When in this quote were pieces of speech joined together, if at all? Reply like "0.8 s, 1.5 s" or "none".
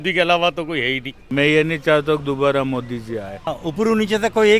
1.2 s, 3.5 s

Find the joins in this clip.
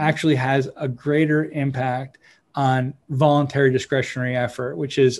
3.0 s

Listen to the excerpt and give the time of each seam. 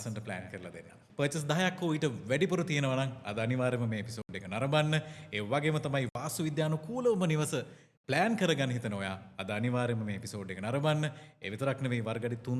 1.0 s

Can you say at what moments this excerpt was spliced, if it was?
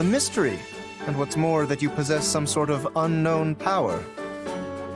4.0 s

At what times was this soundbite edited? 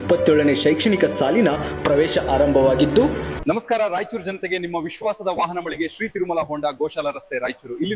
3.3 s

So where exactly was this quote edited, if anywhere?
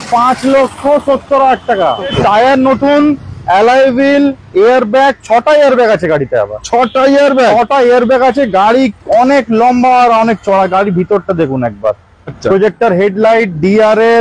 2.1 s, 12.4 s

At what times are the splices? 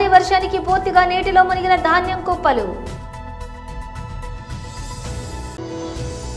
3.3 s, 5.5 s

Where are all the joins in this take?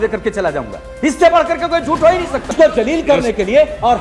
2.5 s

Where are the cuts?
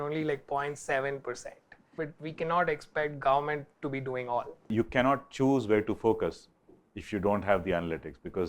4.7 s

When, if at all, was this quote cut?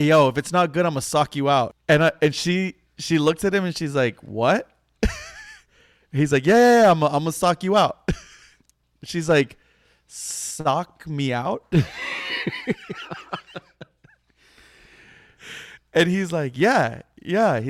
1.8 s

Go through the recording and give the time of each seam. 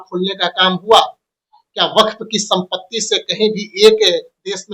none

